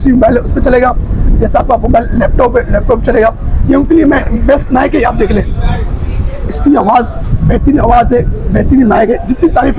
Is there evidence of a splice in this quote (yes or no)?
no